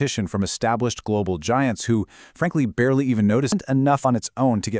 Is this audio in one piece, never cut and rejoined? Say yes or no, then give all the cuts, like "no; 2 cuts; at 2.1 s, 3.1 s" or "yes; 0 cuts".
no; 1 cut; at 3.5 s